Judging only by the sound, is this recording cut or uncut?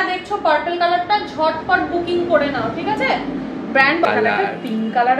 cut